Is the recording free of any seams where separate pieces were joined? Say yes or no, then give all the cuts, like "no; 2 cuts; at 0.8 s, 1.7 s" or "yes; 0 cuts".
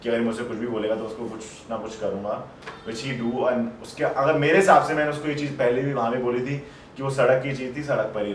yes; 0 cuts